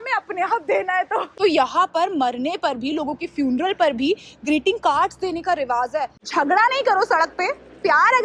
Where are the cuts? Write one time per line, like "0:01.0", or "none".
0:01.4
0:06.2